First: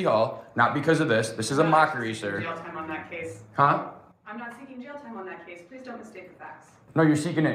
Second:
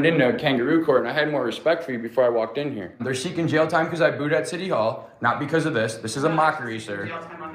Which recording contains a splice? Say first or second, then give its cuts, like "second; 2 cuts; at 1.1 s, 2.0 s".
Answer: second; 1 cut; at 2.9 s